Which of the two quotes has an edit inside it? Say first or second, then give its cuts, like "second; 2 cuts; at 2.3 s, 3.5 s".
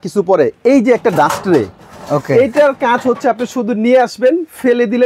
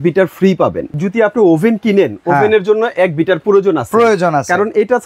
second; 1 cut; at 1.0 s